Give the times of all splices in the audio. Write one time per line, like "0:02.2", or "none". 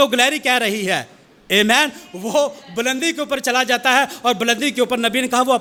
none